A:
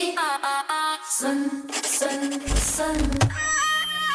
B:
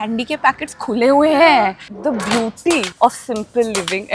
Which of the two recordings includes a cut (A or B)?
B